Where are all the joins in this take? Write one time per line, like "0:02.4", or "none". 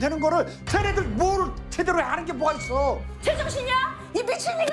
0:03.1